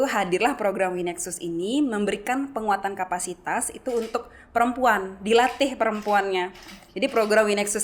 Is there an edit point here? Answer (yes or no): no